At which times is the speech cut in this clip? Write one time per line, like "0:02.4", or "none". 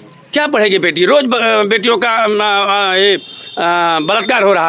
none